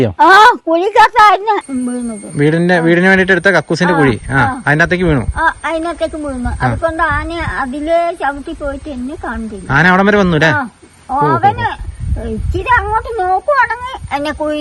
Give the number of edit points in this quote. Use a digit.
0